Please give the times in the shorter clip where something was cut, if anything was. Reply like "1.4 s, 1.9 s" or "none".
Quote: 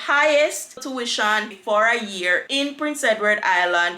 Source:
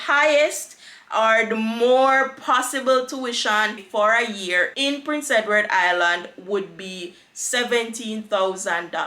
0.9 s